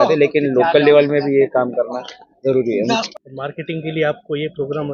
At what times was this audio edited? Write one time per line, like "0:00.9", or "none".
0:03.1